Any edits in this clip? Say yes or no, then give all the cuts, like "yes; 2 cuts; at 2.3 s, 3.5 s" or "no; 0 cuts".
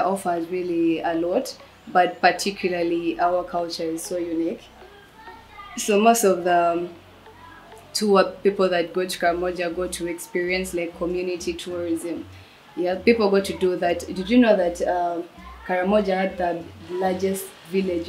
no; 0 cuts